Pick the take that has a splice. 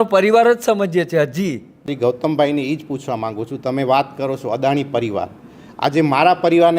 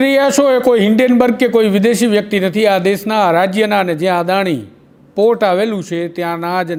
first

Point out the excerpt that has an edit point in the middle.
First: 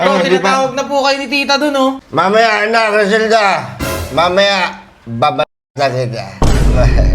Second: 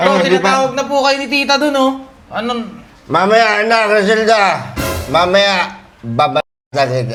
first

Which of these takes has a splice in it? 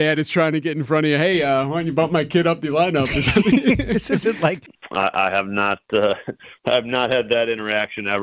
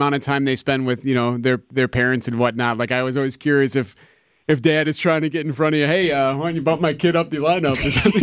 first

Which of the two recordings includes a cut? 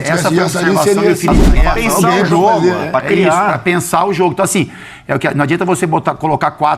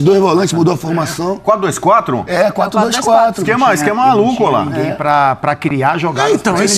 first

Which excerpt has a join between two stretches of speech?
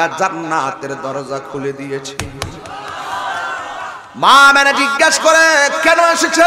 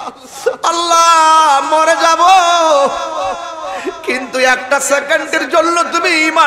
first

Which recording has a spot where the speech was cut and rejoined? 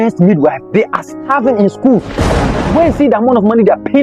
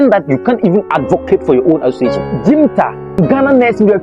first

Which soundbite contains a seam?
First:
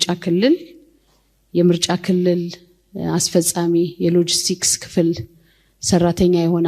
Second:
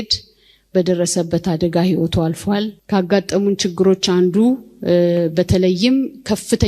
second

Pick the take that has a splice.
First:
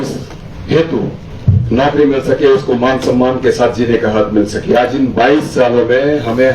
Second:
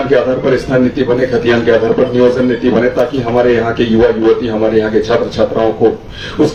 first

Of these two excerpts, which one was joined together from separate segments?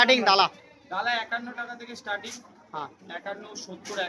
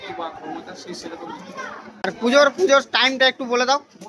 second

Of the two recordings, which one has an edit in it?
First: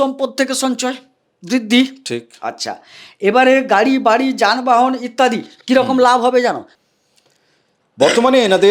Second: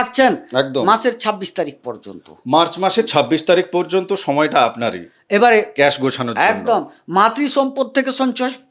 first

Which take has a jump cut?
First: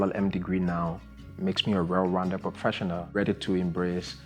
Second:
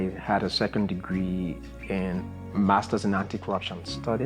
first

